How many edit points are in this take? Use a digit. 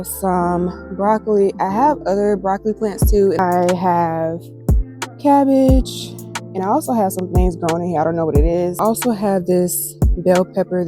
2